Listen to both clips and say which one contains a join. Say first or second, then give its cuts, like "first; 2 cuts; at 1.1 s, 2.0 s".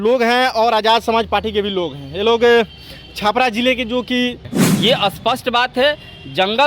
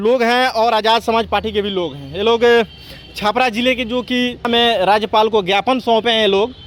first; 1 cut; at 4.4 s